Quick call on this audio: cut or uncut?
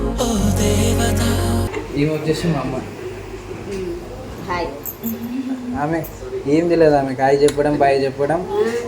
cut